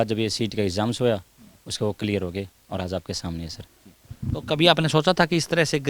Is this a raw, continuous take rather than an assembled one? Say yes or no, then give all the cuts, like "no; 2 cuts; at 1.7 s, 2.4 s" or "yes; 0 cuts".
yes; 0 cuts